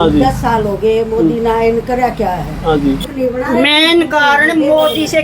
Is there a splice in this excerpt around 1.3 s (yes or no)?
no